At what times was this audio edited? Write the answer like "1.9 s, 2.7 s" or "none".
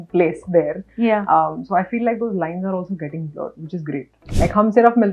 4.1 s